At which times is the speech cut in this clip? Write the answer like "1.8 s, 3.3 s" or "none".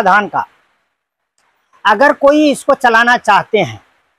none